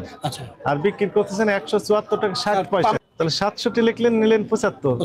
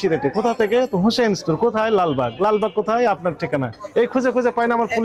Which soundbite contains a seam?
first; 1 cut; at 3.0 s

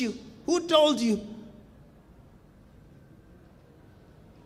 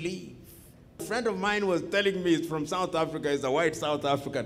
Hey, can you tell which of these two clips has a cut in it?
second; 1 cut; at 1.1 s

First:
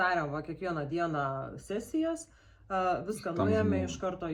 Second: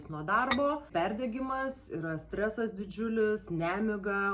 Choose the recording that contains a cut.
second; 1 cut; at 0.9 s

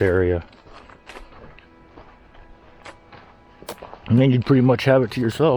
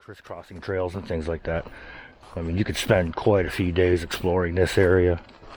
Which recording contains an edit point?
first; 1 cut; at 2.8 s

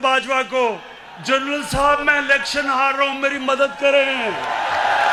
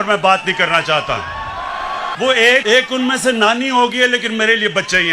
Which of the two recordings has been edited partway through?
second; 2 cuts; at 2.1 s, 2.6 s

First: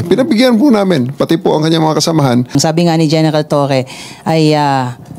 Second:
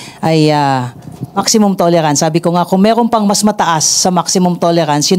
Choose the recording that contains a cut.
first; 1 cut; at 2.6 s

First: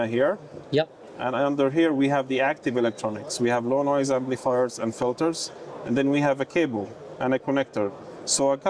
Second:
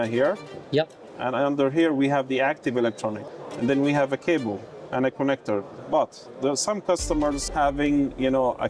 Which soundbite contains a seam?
second; 3 cuts; at 3.2 s, 5.7 s, 7.4 s

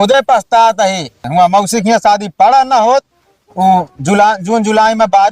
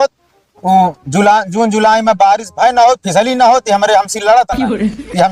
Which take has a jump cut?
first; 1 cut; at 1.2 s

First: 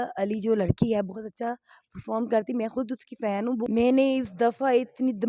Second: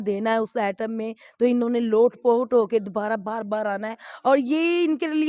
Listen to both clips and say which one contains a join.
first; 1 cut; at 3.7 s

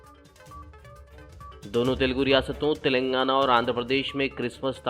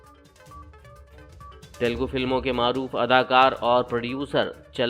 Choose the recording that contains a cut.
second; 1 cut; at 1.3 s

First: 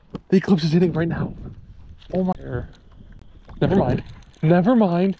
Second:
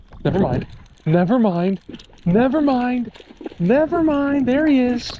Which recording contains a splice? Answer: first; 1 cut; at 2.3 s

